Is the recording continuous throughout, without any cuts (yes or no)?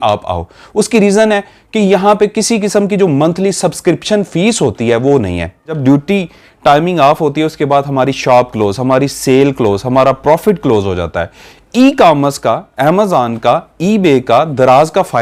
no